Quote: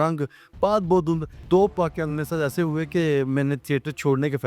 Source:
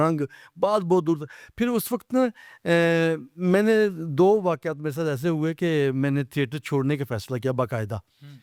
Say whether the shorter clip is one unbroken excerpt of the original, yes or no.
no